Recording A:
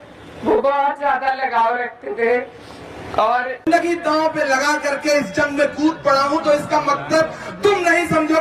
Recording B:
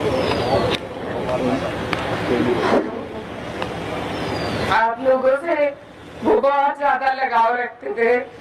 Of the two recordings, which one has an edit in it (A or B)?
A